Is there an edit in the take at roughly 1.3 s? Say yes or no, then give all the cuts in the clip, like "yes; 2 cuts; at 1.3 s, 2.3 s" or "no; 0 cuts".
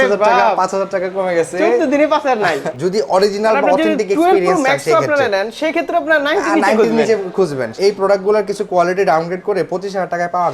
no; 2 cuts; at 2.7 s, 7.6 s